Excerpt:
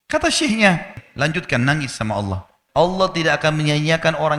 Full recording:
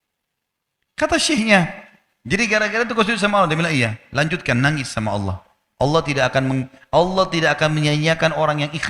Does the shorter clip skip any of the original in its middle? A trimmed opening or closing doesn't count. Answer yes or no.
yes